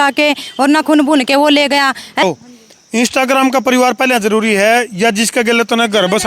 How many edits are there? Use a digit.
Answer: 1